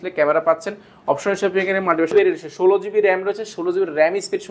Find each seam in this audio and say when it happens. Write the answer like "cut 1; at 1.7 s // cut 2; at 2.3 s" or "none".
cut 1; at 2.1 s